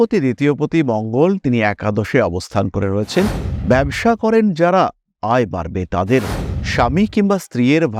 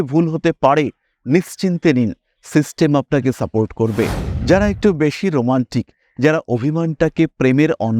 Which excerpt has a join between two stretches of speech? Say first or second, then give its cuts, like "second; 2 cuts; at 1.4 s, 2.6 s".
second; 1 cut; at 4.3 s